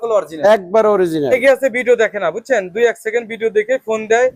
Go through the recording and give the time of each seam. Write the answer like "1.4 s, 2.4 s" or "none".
1.3 s